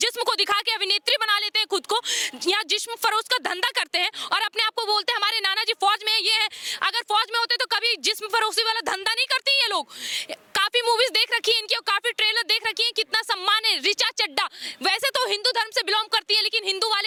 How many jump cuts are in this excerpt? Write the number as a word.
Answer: zero